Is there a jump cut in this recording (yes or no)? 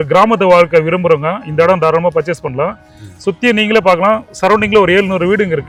no